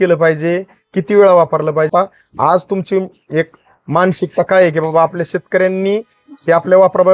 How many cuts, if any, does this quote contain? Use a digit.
1